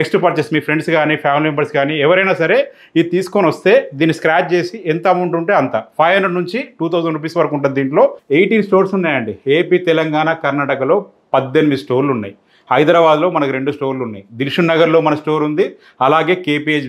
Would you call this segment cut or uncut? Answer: cut